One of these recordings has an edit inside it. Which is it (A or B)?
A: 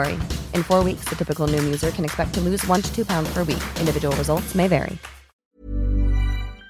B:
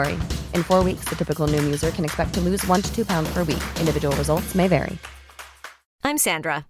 A